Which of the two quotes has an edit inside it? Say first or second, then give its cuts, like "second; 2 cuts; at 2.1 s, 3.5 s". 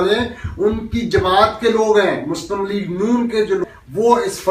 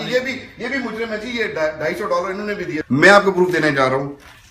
second; 1 cut; at 2.8 s